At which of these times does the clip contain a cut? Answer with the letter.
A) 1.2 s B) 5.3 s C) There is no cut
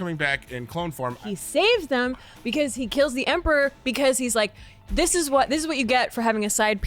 A